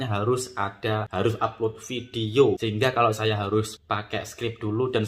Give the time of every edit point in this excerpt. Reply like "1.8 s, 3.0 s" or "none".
1.1 s, 2.6 s, 3.8 s